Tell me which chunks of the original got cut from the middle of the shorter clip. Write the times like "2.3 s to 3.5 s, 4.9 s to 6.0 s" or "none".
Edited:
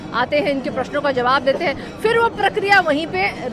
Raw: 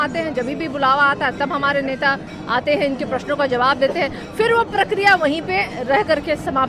none